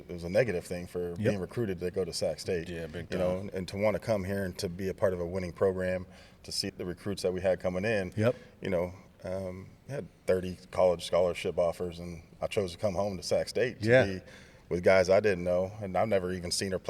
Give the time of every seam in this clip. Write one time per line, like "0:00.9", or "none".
0:06.7